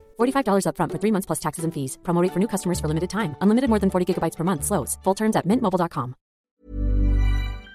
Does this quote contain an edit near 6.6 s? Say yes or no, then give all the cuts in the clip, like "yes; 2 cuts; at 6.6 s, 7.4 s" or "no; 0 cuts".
yes; 1 cut; at 6.6 s